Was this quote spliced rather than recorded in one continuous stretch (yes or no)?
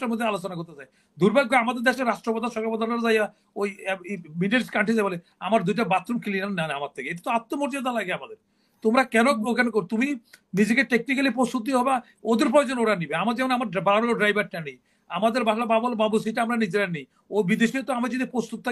no